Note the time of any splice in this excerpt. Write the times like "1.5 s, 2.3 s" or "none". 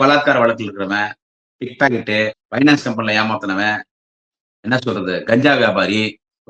2.4 s